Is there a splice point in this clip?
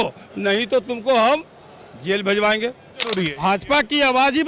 yes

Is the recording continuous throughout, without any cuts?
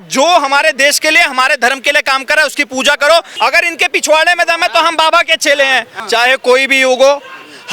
no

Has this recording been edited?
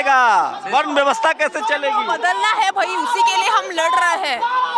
no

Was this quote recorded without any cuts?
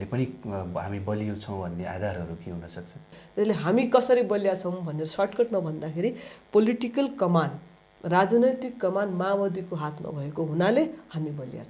no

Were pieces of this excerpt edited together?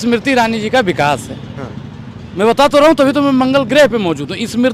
no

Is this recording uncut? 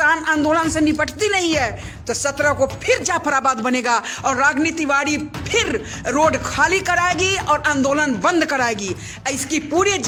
yes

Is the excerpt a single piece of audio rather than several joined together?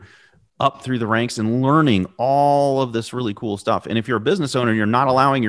yes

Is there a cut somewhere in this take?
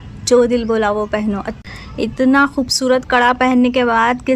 yes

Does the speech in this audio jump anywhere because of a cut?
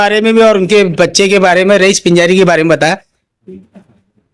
yes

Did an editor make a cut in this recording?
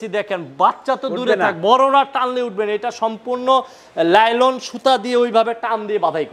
no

